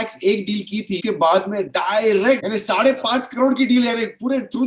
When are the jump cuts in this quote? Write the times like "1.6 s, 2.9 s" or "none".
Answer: 1.0 s, 2.4 s

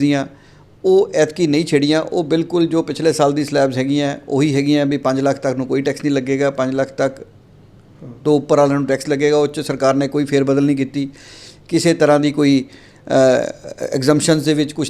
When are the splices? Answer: none

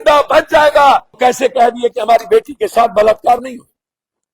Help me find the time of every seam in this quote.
1.1 s

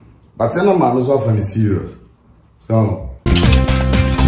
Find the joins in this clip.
3.2 s

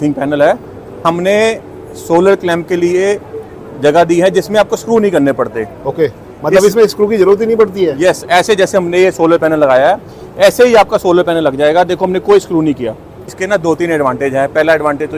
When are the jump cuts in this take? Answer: 1.0 s, 13.3 s

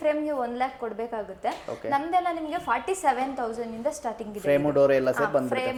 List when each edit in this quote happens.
none

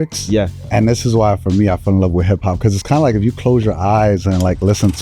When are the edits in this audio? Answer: none

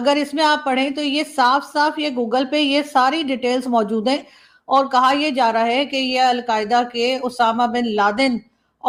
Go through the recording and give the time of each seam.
none

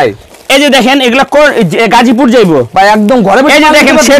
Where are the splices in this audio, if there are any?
none

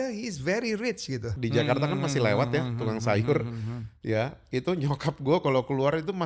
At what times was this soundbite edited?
1.3 s

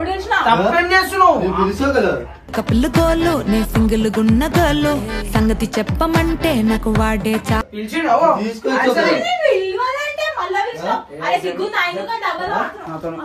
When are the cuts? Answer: 7.6 s

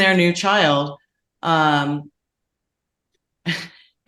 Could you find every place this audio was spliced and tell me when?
none

